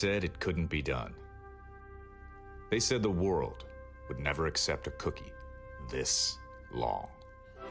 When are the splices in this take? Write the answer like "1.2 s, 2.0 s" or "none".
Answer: 4.6 s